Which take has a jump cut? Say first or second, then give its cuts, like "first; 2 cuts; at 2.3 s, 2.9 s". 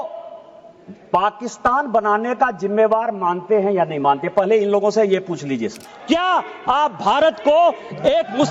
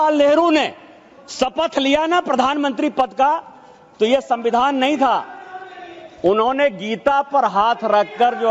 first; 1 cut; at 5.9 s